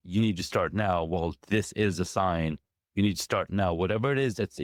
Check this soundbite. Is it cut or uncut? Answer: uncut